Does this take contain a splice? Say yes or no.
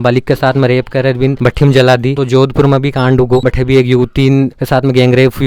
yes